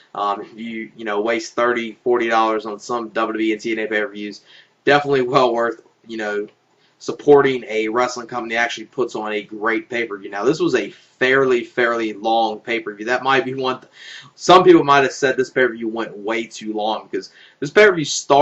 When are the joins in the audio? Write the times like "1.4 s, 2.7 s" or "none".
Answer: 3.8 s